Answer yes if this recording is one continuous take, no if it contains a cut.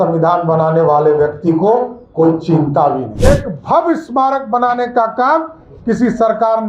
no